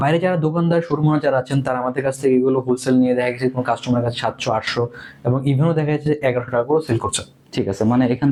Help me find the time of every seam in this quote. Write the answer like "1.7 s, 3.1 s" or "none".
none